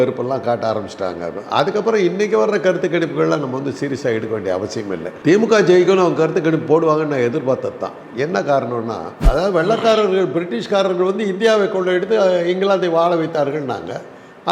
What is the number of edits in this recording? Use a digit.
1